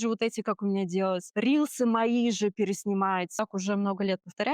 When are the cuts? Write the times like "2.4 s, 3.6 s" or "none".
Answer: 3.3 s